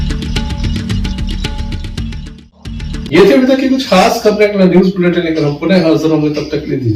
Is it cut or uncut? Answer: uncut